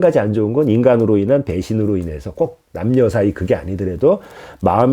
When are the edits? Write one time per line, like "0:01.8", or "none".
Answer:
none